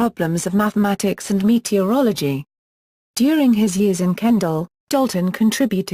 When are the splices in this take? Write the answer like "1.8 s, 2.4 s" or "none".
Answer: none